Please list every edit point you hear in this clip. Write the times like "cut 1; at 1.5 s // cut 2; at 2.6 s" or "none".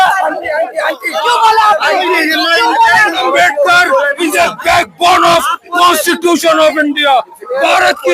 cut 1; at 3.2 s